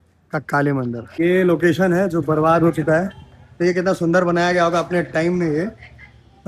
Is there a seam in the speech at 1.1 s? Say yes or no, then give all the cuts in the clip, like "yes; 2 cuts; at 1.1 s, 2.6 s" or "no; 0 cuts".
yes; 1 cut; at 1.1 s